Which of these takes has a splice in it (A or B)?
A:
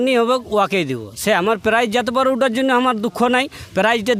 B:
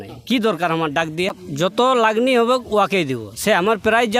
B